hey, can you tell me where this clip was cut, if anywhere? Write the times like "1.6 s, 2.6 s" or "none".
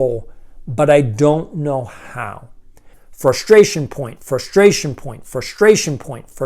3.0 s

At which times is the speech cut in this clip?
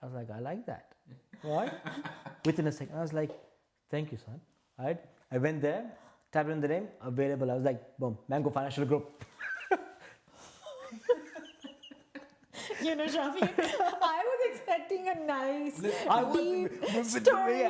none

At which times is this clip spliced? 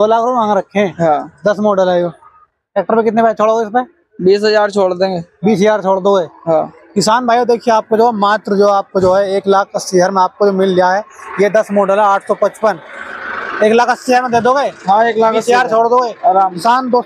none

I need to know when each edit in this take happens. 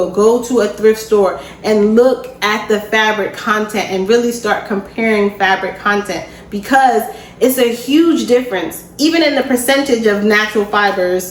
none

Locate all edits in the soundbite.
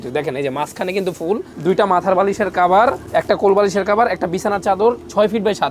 none

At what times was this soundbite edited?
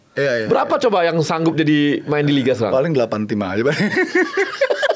none

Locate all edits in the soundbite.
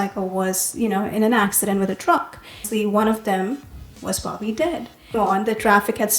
2.7 s, 5.2 s

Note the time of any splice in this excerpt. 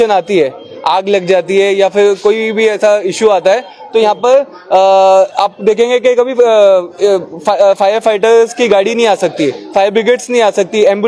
none

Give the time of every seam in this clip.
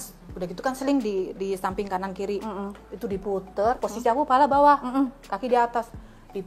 none

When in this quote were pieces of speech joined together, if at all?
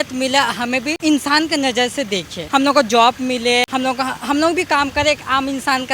0.9 s, 2.4 s, 3.7 s

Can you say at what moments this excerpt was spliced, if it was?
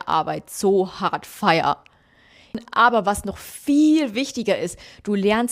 2.6 s

